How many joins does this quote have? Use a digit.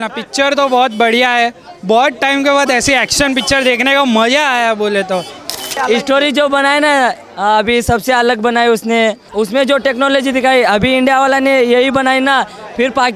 2